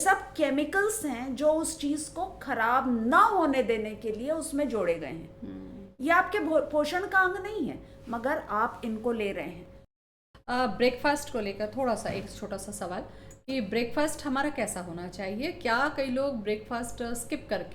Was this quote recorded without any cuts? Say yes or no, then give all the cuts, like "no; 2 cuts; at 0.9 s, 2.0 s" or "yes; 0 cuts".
no; 1 cut; at 10.0 s